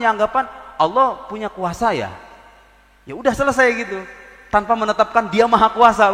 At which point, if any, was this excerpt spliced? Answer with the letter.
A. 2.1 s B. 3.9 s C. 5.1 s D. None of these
D